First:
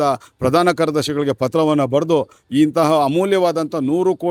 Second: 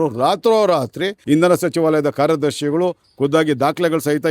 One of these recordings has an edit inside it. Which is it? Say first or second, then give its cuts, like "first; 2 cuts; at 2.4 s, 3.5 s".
second; 1 cut; at 1.2 s